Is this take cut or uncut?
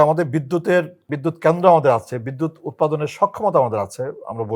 cut